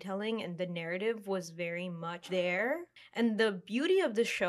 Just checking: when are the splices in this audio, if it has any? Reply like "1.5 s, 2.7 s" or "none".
2.9 s

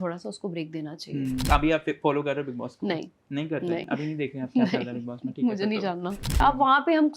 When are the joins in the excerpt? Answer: 1.5 s, 6.4 s

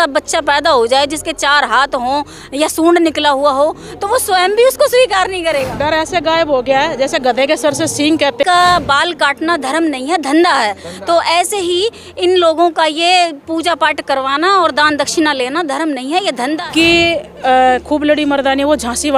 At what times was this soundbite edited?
5.7 s, 8.4 s, 16.6 s

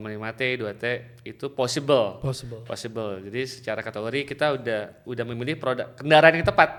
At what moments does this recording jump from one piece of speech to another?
none

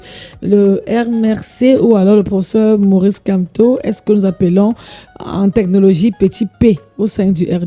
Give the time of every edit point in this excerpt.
none

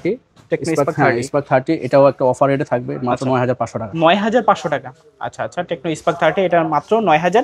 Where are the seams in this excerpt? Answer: none

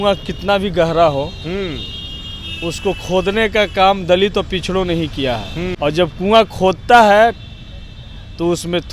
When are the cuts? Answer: 5.6 s

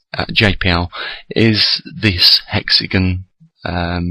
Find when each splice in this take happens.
1.3 s

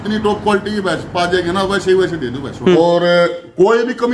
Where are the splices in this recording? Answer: 2.8 s

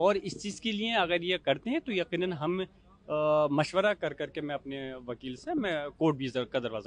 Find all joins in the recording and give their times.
none

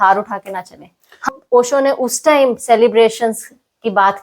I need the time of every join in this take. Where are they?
1.3 s

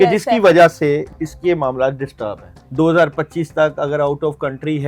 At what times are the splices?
1.1 s, 2.6 s

